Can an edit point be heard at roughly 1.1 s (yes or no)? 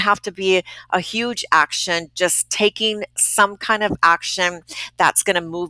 no